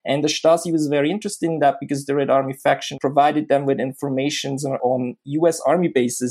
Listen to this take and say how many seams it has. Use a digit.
2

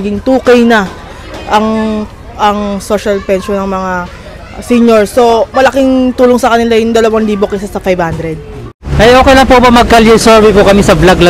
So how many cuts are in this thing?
1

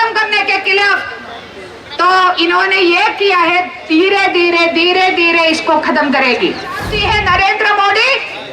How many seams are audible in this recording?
1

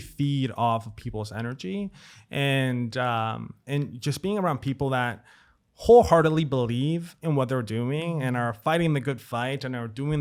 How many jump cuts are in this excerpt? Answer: 0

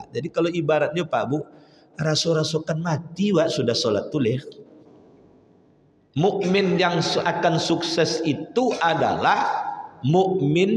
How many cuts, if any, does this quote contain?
1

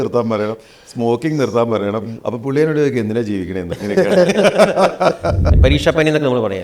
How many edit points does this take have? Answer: 1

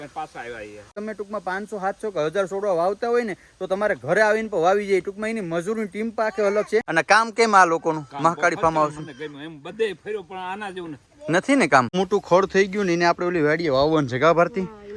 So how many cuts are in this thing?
3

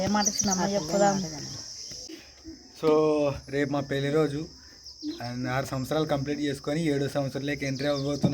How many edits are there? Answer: 1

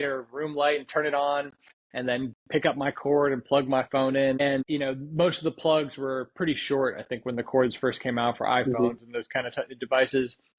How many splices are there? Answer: 1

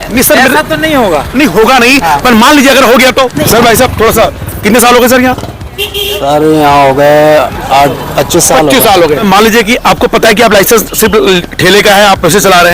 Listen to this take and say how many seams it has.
2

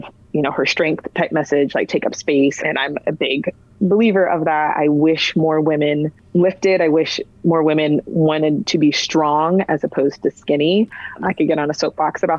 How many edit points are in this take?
3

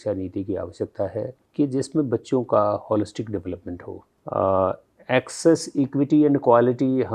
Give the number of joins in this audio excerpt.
1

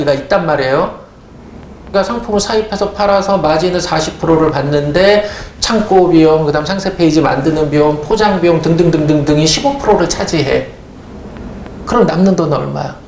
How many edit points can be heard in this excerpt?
1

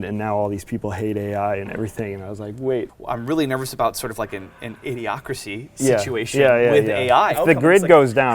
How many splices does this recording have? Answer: 2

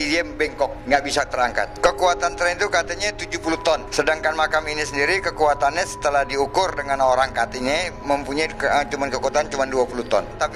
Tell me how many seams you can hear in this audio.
0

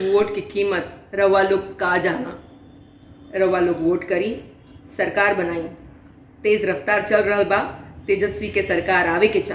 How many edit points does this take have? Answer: 0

